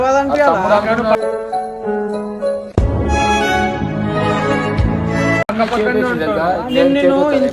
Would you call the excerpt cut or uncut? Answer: uncut